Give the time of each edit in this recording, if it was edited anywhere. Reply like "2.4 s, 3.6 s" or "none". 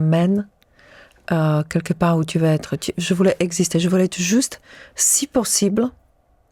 none